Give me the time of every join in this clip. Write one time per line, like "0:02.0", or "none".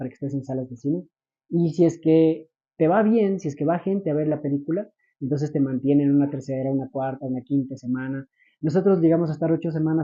none